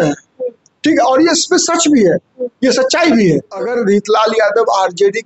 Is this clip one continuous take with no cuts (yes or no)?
no